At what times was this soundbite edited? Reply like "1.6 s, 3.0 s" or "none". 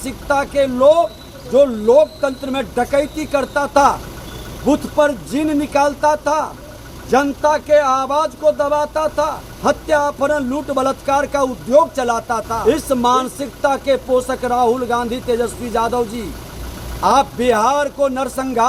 9.4 s, 12.5 s